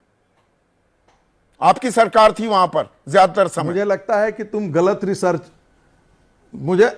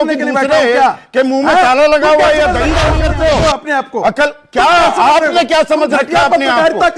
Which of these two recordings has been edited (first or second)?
second